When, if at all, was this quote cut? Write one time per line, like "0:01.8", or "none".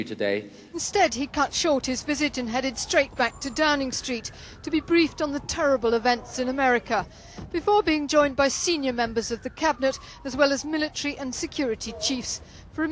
0:07.9